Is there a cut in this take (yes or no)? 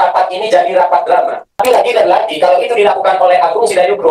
yes